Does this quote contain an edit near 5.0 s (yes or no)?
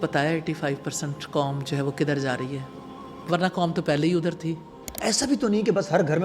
yes